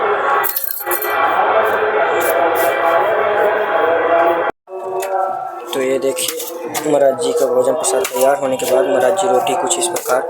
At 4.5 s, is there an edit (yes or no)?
yes